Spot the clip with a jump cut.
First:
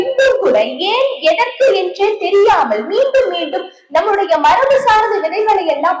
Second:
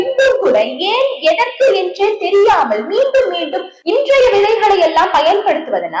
second; 1 cut; at 3.7 s

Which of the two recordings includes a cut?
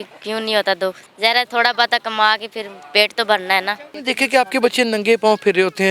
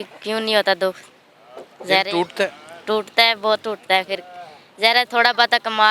first; 2 cuts; at 1.1 s, 3.9 s

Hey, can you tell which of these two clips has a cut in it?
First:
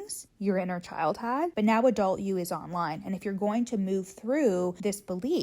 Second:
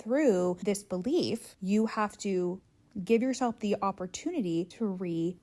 first; 1 cut; at 1.5 s

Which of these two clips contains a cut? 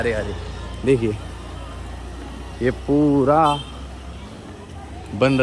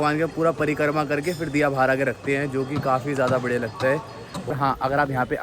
second; 1 cut; at 4.5 s

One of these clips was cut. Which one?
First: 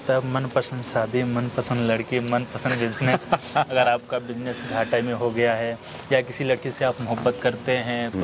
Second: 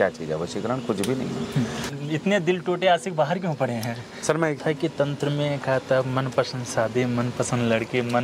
second; 2 cuts; at 1.9 s, 4.6 s

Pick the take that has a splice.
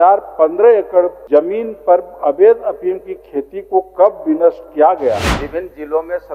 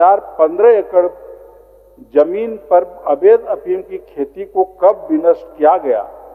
first; 2 cuts; at 1.2 s, 5.3 s

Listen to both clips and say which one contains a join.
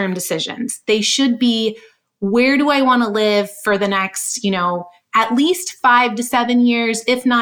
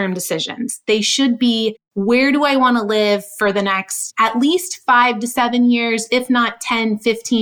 second; 2 cuts; at 1.9 s, 4.0 s

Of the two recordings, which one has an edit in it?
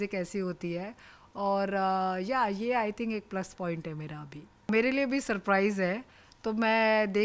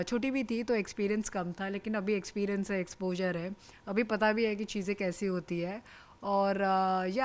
first; 1 cut; at 4.7 s

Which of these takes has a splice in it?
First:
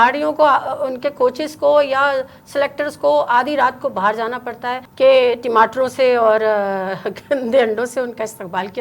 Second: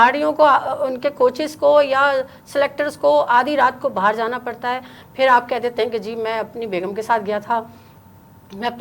first; 1 cut; at 4.8 s

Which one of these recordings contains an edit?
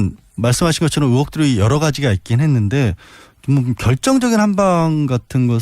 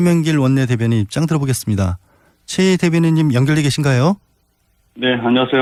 first; 1 cut; at 1.3 s

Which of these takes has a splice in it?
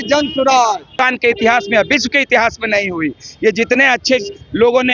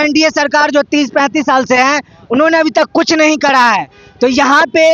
first; 1 cut; at 1.1 s

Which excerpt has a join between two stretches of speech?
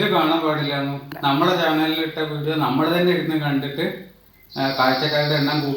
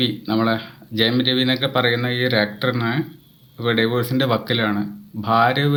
first; 1 cut; at 1.1 s

